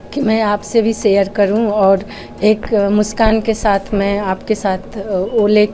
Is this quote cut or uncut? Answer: uncut